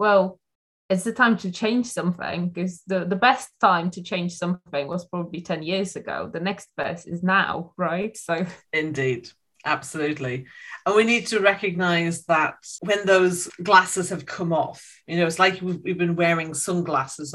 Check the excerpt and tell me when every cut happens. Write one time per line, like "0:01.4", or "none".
0:12.7
0:13.5